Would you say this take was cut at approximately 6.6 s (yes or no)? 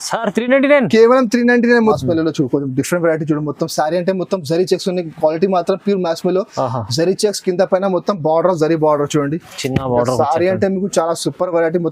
no